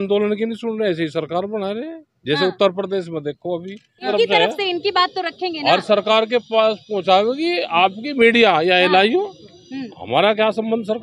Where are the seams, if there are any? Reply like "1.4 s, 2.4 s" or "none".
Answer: 4.1 s

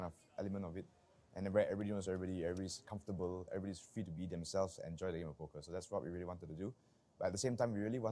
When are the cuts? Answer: 4.5 s, 5.5 s

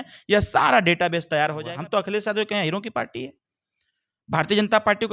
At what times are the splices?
1.7 s

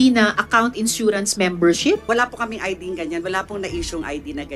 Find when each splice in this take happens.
2.0 s

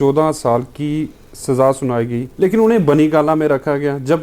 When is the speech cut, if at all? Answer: 2.2 s

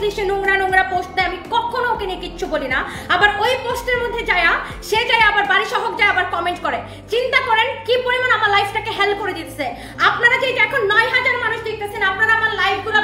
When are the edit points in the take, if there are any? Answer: none

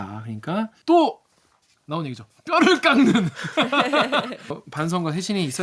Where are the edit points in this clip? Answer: 4.6 s

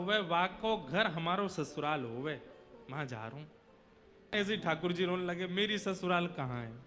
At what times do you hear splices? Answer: 4.3 s

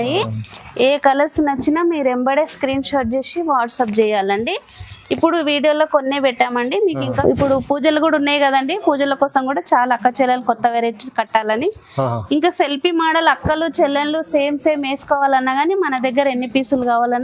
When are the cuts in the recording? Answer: 7.2 s

